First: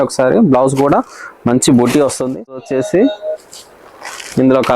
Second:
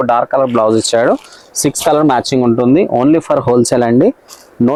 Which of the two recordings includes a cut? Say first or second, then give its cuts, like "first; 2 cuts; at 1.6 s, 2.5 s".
first; 1 cut; at 2.6 s